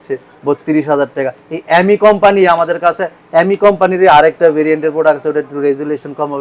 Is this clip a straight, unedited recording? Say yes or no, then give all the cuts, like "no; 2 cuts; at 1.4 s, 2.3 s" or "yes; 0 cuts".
yes; 0 cuts